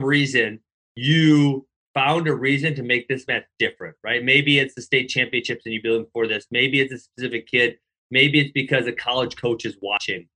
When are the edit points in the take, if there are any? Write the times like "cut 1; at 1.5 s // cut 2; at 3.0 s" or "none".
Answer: cut 1; at 1.7 s